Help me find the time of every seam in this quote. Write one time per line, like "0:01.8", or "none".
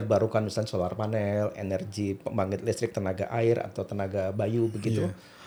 none